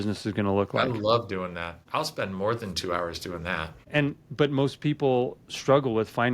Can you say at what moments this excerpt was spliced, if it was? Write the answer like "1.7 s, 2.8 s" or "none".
1.8 s, 3.7 s